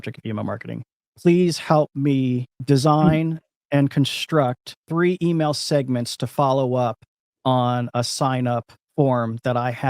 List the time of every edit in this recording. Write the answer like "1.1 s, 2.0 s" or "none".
2.5 s, 4.7 s, 8.8 s